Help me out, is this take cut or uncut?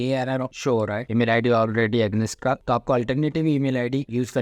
uncut